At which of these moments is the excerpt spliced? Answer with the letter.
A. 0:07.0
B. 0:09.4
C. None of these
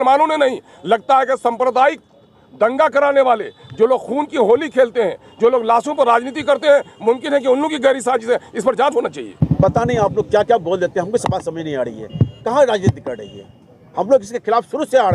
B